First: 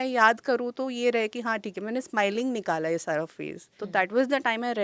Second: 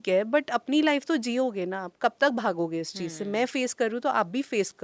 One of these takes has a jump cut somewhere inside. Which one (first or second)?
first